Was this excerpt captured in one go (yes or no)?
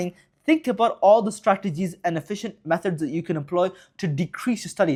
yes